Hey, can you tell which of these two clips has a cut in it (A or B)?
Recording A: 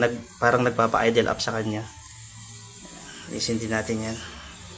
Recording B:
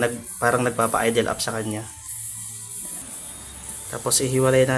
B